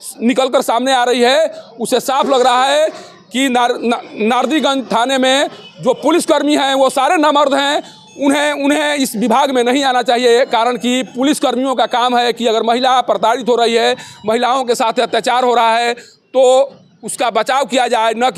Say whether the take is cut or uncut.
uncut